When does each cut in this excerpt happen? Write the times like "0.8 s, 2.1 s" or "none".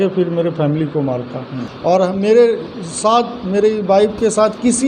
1.6 s